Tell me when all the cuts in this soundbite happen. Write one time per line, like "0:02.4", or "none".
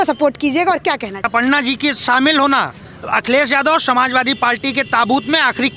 0:01.3